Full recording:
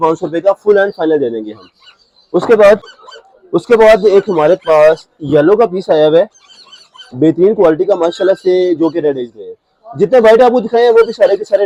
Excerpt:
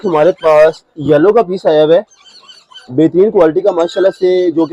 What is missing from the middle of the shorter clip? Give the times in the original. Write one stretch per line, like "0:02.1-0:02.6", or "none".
none